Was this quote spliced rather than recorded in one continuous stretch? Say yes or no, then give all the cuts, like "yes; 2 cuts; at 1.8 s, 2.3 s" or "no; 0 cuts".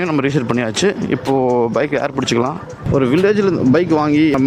yes; 1 cut; at 2.8 s